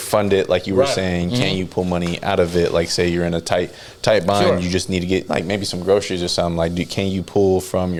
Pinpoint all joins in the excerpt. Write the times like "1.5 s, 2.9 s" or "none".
none

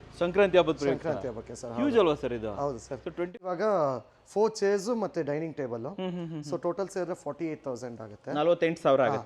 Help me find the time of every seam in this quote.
3.4 s

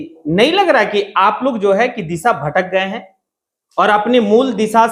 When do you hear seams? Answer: none

